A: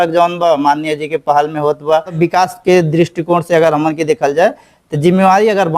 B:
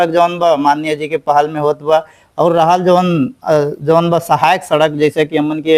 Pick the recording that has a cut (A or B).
A